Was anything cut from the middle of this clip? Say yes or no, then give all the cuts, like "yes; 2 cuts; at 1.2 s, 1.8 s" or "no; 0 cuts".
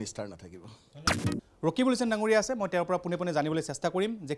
no; 0 cuts